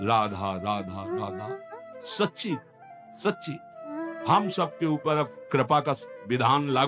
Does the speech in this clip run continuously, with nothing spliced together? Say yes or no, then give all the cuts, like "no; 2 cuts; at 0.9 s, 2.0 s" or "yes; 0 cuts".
yes; 0 cuts